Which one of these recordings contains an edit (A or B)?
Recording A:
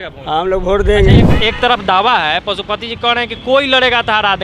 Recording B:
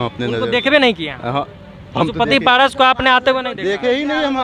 A